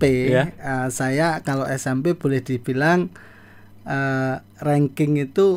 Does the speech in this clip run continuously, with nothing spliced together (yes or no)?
yes